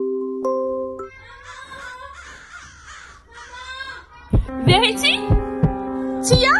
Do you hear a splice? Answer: yes; 1 cut; at 1.0 s

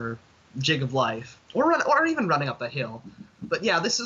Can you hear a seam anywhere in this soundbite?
yes; 1 cut; at 1.3 s

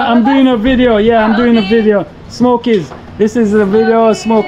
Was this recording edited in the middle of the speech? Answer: no; 0 cuts

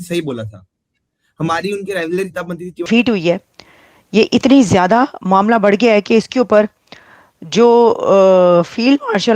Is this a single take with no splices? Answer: no; 1 cut; at 2.9 s

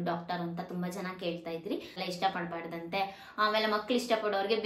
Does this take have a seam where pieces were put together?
yes; 1 cut; at 2.0 s

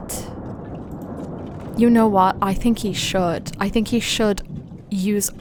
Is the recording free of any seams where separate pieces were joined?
yes; 0 cuts

